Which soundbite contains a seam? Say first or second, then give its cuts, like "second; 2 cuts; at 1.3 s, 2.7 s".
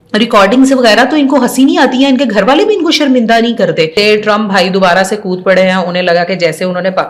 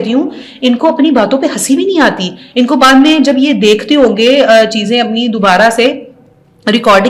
first; 1 cut; at 3.9 s